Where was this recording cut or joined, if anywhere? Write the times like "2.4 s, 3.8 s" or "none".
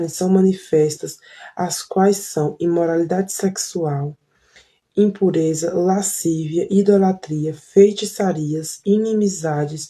8.0 s